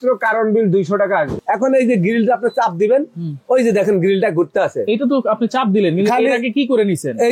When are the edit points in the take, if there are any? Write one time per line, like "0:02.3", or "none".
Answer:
0:01.3